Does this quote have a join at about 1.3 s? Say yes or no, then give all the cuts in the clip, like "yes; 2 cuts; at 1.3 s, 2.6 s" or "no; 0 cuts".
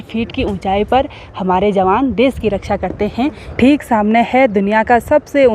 no; 1 cut; at 3.4 s